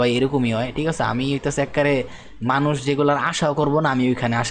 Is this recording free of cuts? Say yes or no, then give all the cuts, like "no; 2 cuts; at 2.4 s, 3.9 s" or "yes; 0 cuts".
yes; 0 cuts